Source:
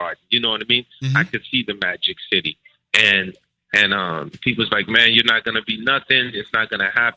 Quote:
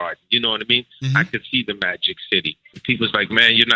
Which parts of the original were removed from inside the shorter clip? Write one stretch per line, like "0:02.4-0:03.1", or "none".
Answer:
0:02.8-0:04.3